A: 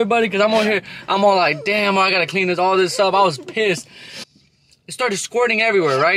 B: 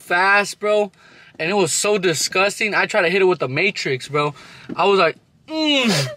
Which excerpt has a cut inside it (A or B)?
A